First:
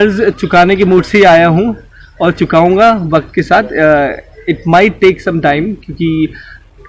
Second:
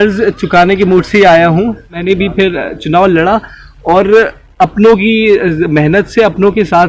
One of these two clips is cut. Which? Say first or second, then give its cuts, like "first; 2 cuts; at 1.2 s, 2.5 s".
second; 1 cut; at 2.0 s